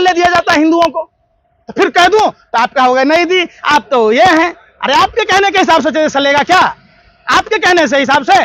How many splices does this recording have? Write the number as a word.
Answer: zero